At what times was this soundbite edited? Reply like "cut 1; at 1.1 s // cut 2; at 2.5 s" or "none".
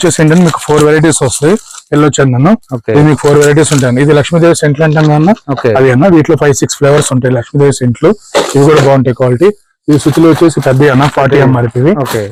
none